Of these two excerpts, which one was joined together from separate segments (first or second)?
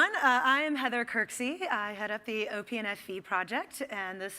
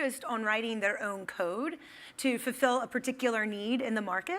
second